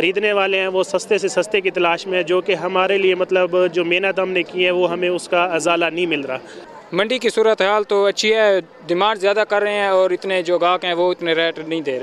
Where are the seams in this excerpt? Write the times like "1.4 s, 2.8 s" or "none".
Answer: 6.6 s